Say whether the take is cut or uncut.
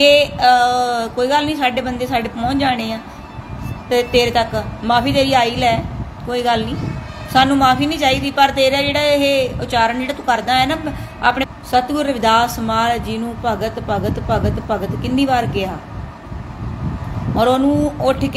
cut